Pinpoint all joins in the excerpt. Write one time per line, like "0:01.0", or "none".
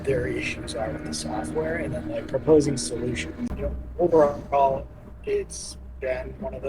0:03.4